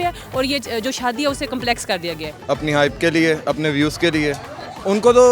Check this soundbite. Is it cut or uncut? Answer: cut